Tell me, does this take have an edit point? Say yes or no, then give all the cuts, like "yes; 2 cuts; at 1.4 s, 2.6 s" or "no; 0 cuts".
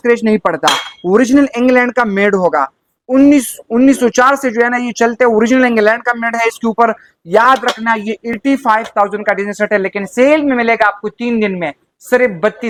no; 0 cuts